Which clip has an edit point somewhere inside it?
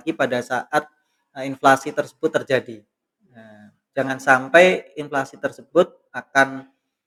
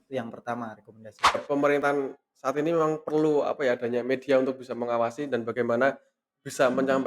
second; 1 cut; at 1.4 s

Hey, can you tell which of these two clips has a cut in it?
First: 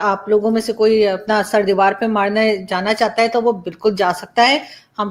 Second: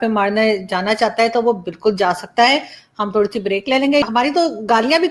second; 1 cut; at 4.0 s

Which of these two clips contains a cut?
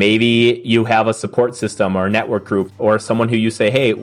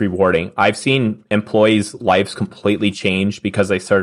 first; 1 cut; at 2.7 s

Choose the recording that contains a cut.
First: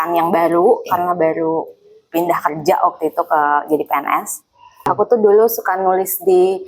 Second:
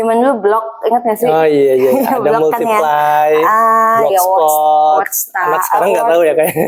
first; 1 cut; at 4.9 s

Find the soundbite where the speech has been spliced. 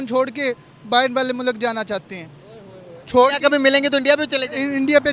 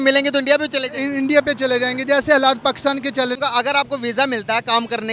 second; 1 cut; at 3.4 s

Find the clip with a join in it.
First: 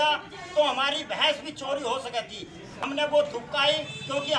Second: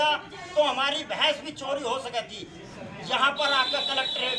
first; 1 cut; at 2.7 s

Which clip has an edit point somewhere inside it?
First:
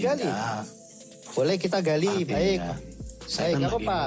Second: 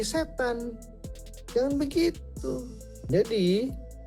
second; 1 cut; at 3.0 s

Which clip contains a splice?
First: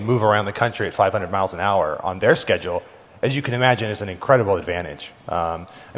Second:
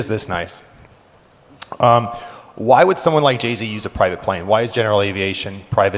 second; 1 cut; at 4.8 s

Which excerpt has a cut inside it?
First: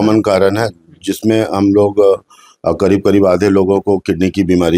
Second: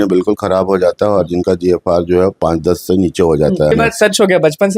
second; 1 cut; at 3.7 s

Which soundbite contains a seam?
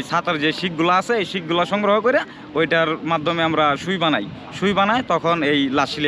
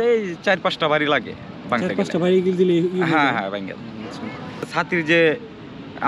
second; 1 cut; at 4.7 s

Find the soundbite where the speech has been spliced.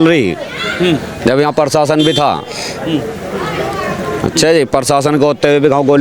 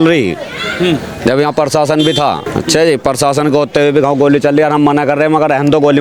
second; 1 cut; at 2.5 s

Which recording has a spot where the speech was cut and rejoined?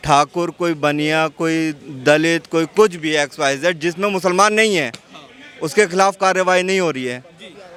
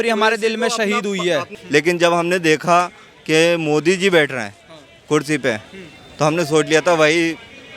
second; 1 cut; at 1.6 s

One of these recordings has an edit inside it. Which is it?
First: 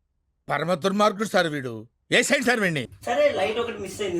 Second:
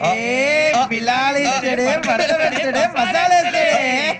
first; 1 cut; at 2.9 s

